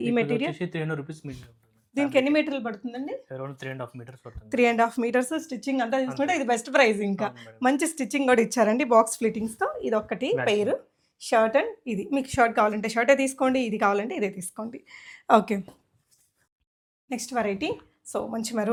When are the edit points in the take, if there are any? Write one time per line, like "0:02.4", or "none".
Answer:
none